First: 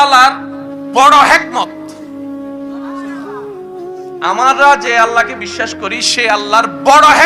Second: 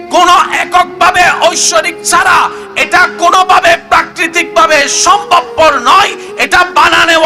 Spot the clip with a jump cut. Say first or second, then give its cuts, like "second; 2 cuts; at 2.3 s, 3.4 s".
first; 2 cuts; at 1.6 s, 4.2 s